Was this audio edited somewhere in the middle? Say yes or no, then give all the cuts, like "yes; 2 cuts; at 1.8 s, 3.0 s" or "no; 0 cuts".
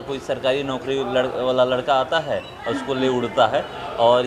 no; 0 cuts